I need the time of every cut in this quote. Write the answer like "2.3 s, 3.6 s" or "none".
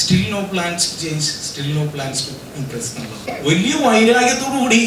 3.3 s